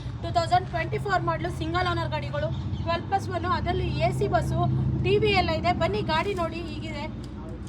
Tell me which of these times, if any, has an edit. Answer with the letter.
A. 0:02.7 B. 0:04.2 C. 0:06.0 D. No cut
D